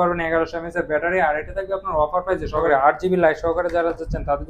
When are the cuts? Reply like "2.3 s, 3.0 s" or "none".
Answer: 2.7 s